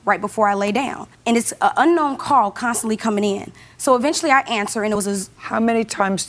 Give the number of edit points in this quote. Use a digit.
1